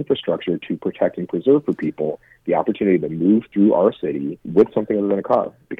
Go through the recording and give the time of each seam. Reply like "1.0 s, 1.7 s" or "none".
4.4 s